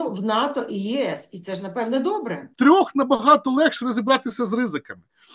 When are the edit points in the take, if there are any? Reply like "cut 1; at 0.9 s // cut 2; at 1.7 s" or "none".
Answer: cut 1; at 2.5 s